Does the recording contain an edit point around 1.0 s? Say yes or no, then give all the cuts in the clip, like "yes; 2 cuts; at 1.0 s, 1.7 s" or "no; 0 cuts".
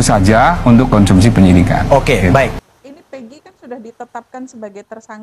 no; 0 cuts